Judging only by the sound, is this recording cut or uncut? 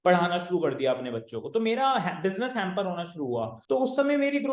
cut